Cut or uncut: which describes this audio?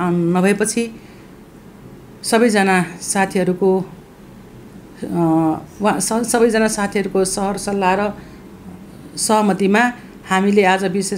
uncut